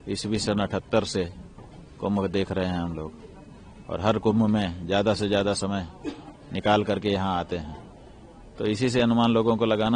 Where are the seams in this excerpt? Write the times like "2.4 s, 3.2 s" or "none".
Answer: none